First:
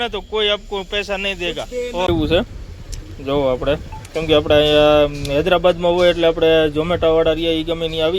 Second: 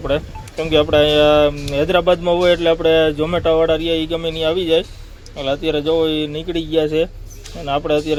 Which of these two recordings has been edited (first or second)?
first